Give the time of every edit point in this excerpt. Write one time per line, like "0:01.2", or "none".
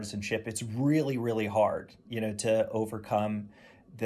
none